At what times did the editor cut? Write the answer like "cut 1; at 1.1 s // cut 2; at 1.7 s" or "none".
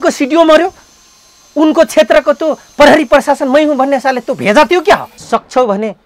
cut 1; at 5.1 s